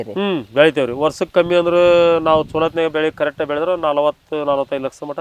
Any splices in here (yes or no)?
no